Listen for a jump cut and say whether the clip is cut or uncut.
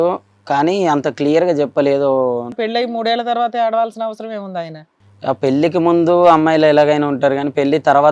cut